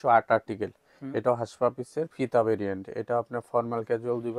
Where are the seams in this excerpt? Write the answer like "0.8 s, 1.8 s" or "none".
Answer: none